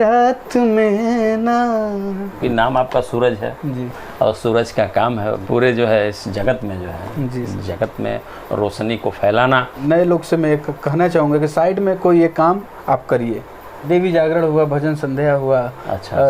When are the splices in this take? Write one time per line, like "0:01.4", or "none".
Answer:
0:02.4
0:05.4
0:09.7
0:13.8

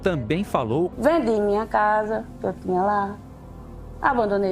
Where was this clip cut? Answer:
0:00.9

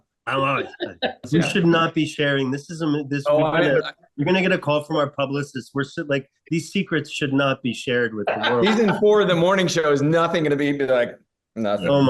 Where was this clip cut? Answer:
0:01.2

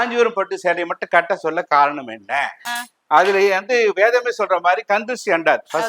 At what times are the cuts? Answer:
none

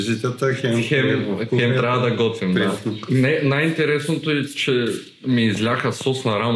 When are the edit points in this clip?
0:02.7

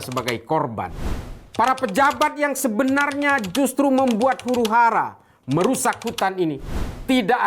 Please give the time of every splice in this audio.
0:01.4

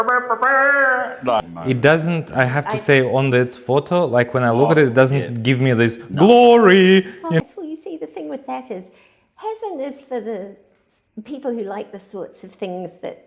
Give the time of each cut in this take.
0:01.4
0:07.4

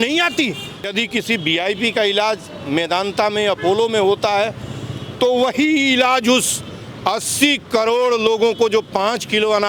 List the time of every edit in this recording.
0:00.9

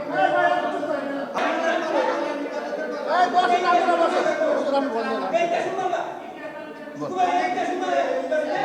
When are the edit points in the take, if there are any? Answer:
0:01.4

